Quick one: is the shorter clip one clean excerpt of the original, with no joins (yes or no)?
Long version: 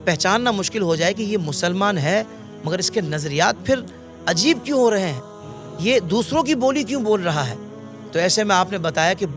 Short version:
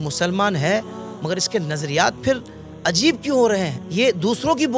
no